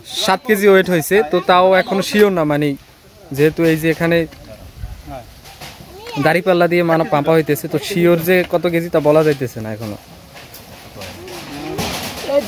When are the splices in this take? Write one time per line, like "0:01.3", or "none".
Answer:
none